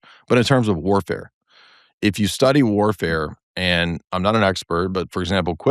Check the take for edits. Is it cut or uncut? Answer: uncut